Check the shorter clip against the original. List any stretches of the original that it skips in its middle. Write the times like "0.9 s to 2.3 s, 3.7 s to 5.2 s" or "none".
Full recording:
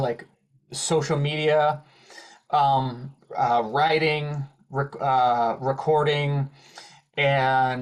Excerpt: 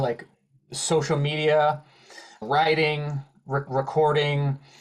2.4 s to 3.7 s, 4.9 s to 5.6 s